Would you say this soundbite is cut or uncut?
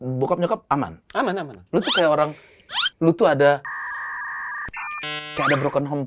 cut